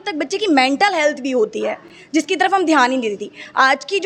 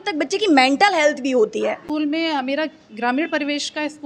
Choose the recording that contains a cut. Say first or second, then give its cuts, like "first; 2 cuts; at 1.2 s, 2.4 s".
second; 1 cut; at 1.8 s